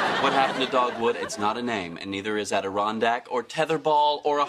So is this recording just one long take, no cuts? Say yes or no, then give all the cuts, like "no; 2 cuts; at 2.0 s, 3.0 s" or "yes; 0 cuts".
no; 1 cut; at 0.9 s